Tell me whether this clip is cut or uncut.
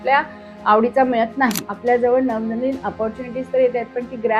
cut